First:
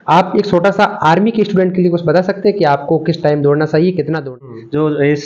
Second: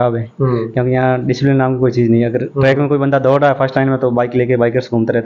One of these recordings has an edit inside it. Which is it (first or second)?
first